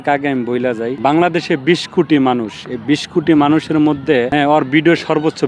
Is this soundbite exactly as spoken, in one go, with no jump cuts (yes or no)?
no